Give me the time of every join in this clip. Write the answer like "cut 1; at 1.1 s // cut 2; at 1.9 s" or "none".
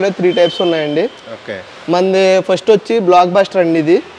none